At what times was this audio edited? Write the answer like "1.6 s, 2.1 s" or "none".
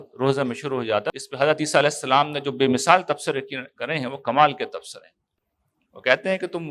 1.1 s